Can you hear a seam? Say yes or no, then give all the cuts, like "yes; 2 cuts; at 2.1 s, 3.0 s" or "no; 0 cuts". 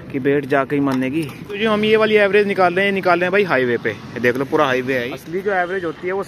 yes; 2 cuts; at 1.6 s, 5.2 s